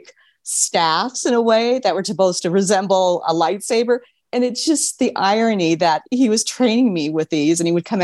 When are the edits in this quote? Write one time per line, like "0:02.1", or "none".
none